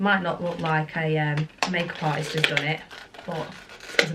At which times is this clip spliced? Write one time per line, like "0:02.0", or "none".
none